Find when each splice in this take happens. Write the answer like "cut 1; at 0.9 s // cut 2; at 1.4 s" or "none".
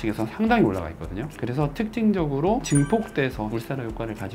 none